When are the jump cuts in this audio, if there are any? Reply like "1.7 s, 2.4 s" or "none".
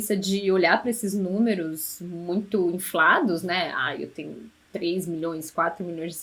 none